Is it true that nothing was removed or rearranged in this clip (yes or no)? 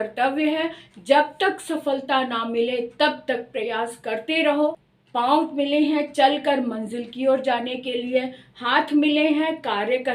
no